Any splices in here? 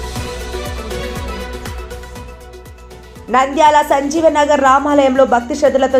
no; 0 cuts

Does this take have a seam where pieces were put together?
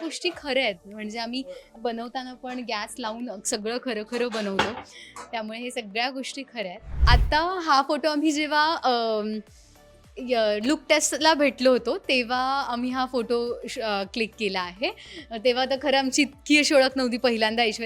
yes; 1 cut; at 6.9 s

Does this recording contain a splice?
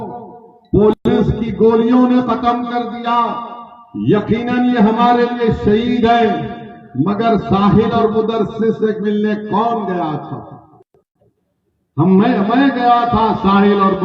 no; 0 cuts

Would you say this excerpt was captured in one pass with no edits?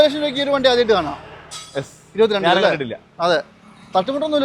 yes; 0 cuts

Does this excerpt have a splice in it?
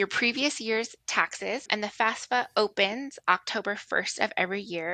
yes; 1 cut; at 1.7 s

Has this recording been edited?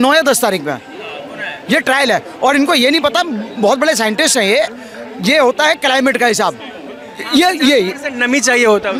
no; 0 cuts

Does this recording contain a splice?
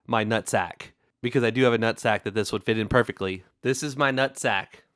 yes; 1 cut; at 3.5 s

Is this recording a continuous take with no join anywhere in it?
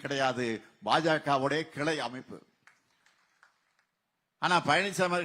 no; 1 cut; at 3.6 s

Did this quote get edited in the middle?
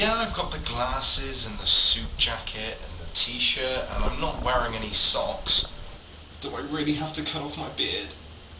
yes; 1 cut; at 4.9 s

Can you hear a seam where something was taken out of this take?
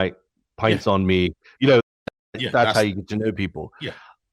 yes; 1 cut; at 1.5 s

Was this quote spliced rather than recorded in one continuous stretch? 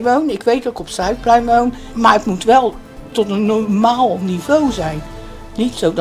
yes; 1 cut; at 1.9 s

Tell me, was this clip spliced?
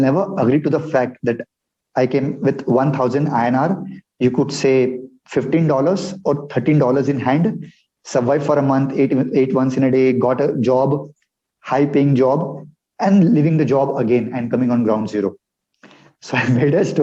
no; 0 cuts

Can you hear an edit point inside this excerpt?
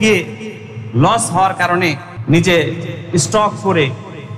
yes; 1 cut; at 2.1 s

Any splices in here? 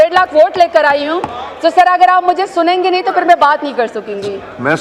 no; 0 cuts

